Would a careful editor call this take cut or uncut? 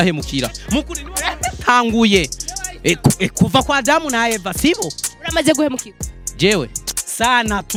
uncut